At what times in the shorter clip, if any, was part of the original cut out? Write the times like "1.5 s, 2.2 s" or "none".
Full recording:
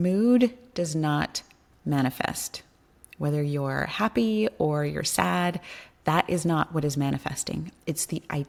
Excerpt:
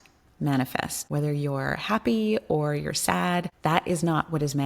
1.0 s, 3.5 s

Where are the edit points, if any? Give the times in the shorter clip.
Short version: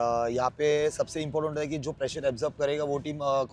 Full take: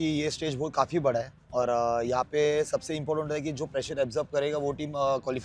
none

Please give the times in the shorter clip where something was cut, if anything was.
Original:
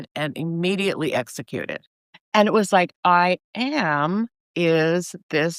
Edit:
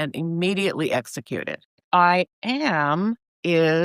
1.8 s

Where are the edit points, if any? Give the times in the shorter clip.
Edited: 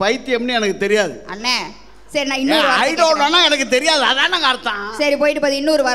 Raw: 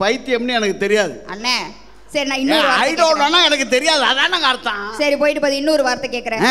none

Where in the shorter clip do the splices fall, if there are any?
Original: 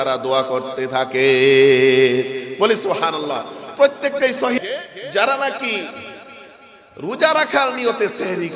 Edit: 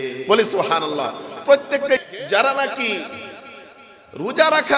2.0 s

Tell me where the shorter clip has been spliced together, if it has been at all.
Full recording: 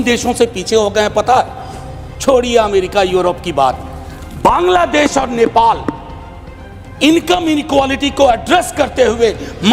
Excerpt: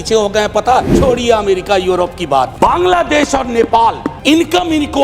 0.9 s, 2.5 s, 4.1 s

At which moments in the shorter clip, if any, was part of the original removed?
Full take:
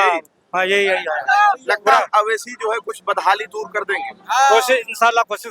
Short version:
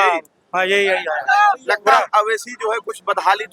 none

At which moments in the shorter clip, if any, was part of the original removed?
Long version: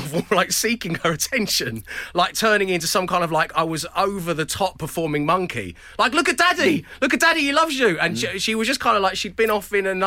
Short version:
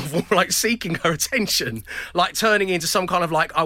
none

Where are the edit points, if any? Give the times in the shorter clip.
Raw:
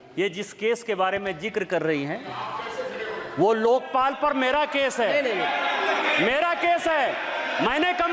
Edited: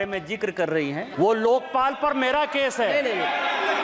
1.1 s

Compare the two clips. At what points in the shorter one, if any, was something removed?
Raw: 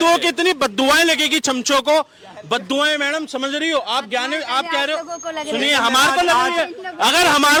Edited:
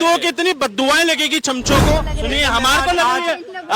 2.1 s

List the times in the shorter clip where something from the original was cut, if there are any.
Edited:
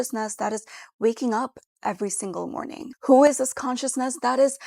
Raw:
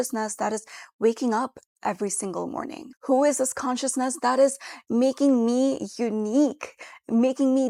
none

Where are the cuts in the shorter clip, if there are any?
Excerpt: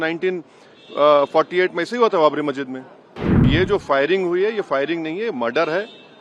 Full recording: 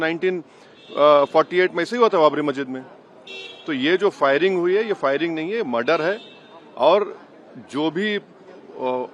3.4 s

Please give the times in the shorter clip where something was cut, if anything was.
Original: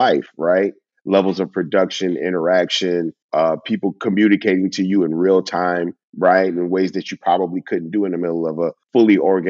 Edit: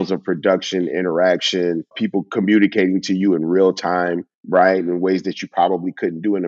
1.9 s

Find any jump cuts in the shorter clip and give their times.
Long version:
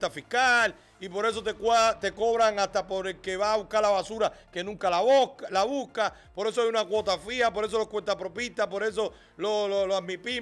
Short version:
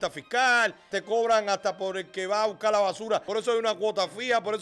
1.0 s, 3.3 s

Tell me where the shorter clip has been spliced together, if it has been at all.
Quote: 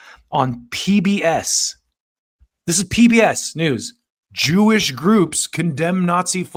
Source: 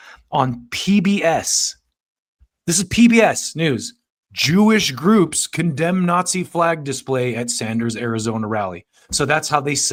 none

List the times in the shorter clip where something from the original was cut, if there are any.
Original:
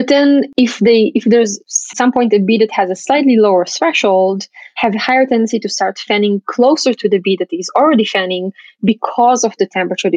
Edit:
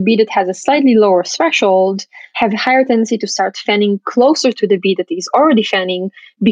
none

